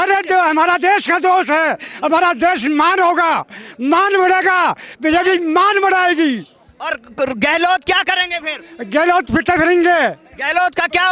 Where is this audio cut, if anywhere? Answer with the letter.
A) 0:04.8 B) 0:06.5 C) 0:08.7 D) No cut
D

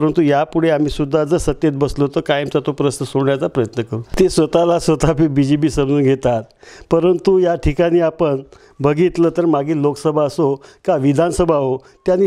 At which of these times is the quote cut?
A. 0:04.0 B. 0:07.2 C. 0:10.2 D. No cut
A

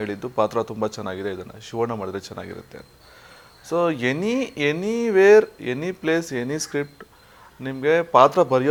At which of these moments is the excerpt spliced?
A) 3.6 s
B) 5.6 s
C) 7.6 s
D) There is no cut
D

